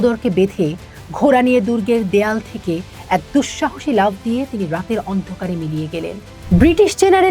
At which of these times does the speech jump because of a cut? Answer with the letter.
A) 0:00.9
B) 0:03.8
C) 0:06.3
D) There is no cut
C